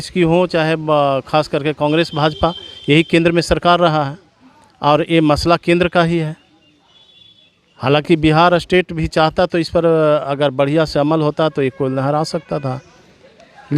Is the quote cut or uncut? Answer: uncut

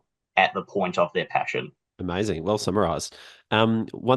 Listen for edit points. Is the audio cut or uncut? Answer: uncut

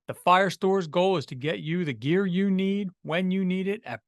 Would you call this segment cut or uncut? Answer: uncut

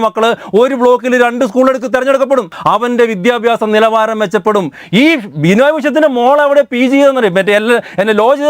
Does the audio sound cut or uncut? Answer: cut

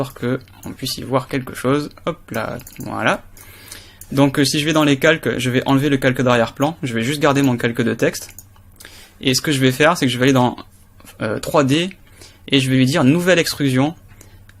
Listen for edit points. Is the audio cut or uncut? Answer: uncut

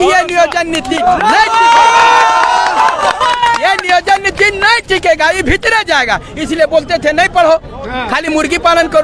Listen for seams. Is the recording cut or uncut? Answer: uncut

